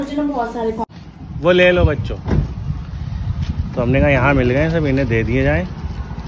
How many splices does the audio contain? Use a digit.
1